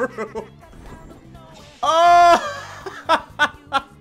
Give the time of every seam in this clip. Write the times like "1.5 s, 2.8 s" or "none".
none